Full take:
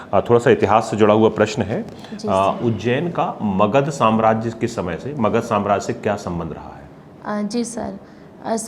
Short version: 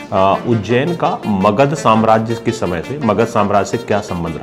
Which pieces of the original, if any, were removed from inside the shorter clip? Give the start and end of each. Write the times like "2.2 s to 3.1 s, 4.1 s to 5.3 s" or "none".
none